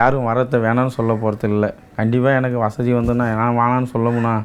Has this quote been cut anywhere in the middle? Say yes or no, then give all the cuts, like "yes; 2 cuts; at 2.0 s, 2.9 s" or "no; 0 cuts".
no; 0 cuts